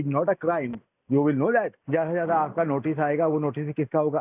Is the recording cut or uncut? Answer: cut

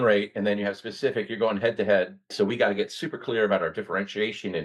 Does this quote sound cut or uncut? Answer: cut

